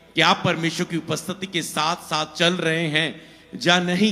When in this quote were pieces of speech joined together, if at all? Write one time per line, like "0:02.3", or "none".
none